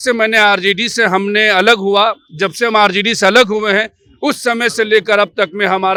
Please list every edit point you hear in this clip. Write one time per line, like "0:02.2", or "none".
none